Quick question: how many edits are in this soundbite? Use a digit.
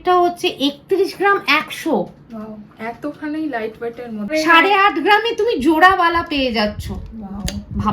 1